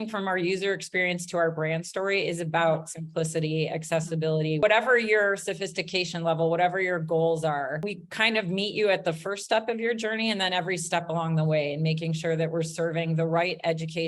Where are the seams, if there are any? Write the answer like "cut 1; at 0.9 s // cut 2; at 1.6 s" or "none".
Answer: cut 1; at 4.6 s // cut 2; at 8.0 s